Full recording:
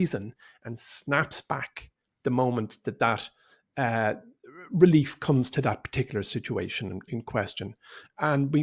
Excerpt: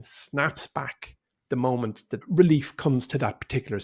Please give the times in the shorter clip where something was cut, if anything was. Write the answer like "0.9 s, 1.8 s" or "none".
2.1 s